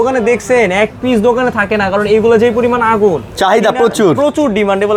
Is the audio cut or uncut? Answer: uncut